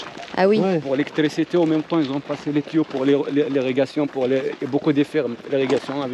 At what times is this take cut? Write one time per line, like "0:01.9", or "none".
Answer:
none